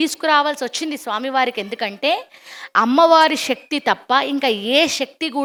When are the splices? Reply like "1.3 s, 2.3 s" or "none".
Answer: none

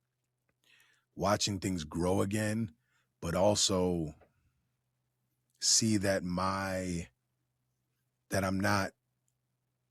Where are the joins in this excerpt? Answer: none

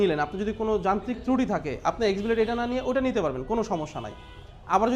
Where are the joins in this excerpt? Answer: none

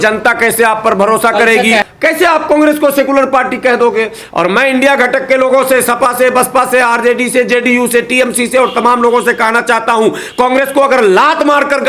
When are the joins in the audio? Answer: 1.9 s

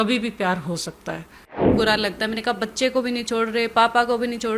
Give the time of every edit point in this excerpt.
1.7 s

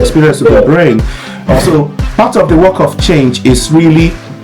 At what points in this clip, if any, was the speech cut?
1.4 s

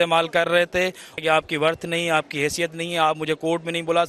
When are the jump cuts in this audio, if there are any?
1.2 s

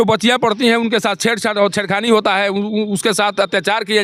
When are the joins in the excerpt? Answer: none

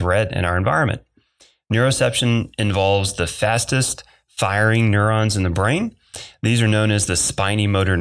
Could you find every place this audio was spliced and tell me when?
none

